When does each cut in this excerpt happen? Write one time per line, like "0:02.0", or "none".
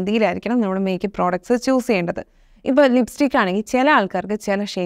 none